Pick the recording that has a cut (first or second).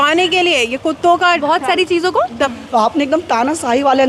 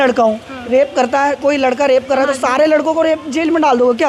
first